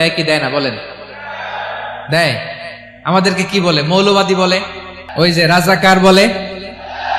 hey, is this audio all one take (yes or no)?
no